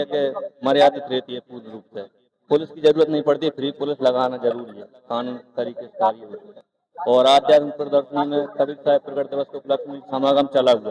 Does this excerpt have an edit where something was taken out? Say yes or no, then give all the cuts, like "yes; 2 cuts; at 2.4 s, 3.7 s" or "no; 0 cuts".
no; 0 cuts